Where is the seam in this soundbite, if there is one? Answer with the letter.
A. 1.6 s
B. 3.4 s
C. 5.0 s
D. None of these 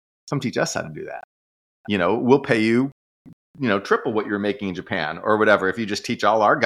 D